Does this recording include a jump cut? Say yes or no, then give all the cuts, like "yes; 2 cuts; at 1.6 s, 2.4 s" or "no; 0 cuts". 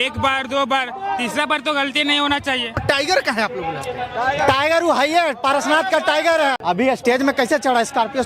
yes; 2 cuts; at 2.8 s, 6.6 s